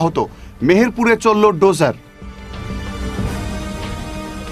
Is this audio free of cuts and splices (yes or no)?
yes